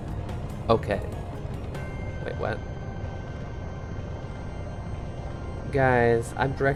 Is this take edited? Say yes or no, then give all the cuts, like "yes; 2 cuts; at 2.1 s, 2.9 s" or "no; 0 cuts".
no; 0 cuts